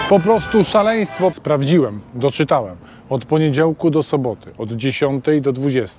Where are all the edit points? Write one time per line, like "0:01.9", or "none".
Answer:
0:01.3